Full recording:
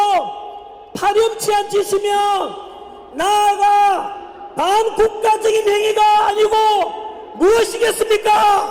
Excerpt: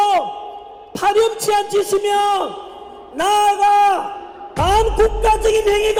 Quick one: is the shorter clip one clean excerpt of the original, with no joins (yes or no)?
yes